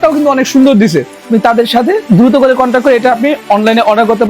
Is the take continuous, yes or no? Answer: no